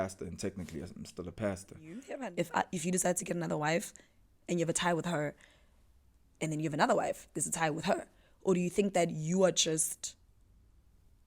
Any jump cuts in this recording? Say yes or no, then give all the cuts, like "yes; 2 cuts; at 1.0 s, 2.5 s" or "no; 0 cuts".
yes; 1 cut; at 2.1 s